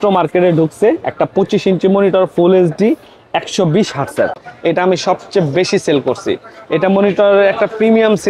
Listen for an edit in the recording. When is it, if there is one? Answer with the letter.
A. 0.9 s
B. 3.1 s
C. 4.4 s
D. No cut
C